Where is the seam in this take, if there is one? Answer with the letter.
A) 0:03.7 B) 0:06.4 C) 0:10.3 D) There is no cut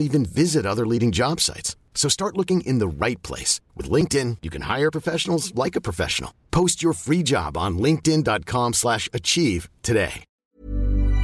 C